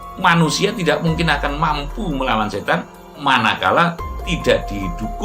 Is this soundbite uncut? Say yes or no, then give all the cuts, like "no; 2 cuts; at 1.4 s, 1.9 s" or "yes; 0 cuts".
yes; 0 cuts